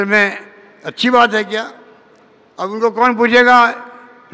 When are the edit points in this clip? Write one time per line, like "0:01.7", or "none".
none